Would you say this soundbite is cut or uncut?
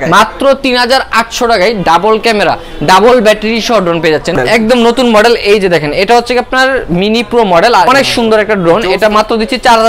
cut